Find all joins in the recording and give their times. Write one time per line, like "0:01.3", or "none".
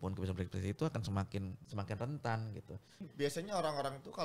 0:01.6
0:03.1